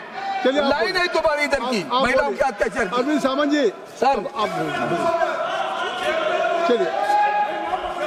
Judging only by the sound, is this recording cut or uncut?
uncut